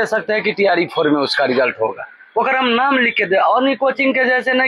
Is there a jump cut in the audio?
no; 0 cuts

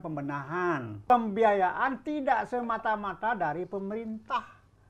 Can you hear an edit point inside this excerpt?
yes; 1 cut; at 1.1 s

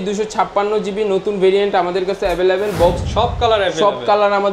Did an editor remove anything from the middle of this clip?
yes; 1 cut; at 3.0 s

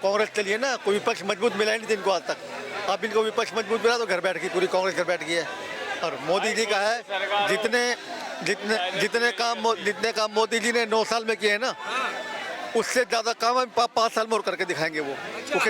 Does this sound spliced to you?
no; 0 cuts

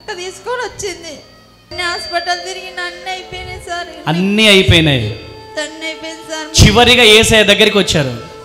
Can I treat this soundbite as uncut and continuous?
no; 1 cut; at 1.7 s

